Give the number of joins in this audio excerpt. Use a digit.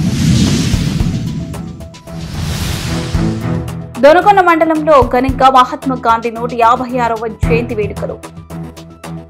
1